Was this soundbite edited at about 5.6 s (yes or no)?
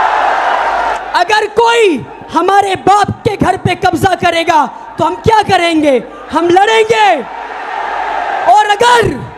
no